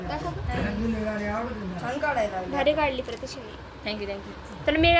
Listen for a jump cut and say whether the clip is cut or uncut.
uncut